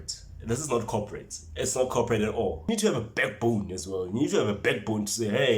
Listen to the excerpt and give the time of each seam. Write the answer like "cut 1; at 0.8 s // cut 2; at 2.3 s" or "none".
cut 1; at 2.7 s